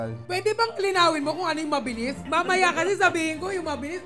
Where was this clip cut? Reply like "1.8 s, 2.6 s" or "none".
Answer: 2.2 s